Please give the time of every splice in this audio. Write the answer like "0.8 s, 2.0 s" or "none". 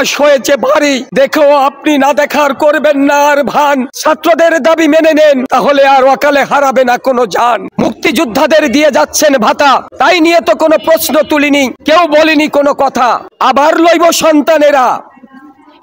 1.1 s, 3.9 s, 5.5 s, 7.6 s, 9.9 s, 11.8 s, 13.3 s